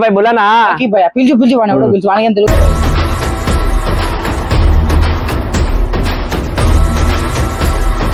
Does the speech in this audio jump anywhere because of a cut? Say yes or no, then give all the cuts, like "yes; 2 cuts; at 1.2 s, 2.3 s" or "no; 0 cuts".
no; 0 cuts